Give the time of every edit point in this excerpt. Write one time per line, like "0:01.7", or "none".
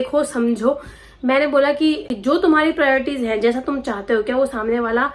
0:02.1